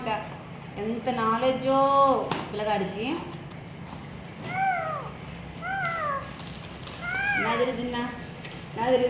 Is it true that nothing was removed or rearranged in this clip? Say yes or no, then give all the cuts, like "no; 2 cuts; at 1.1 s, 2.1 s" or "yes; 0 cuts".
yes; 0 cuts